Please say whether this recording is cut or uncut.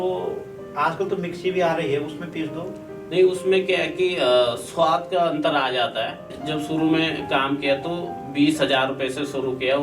cut